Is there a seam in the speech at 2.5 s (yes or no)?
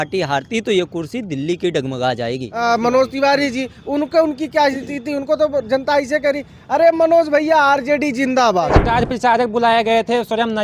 yes